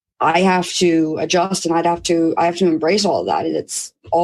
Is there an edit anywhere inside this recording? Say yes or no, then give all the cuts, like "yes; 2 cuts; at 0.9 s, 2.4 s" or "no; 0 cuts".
no; 0 cuts